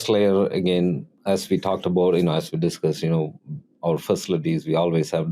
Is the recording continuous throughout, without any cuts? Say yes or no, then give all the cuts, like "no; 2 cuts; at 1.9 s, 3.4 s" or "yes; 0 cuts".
no; 1 cut; at 1.1 s